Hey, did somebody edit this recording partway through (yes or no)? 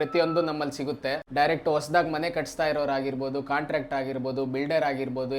yes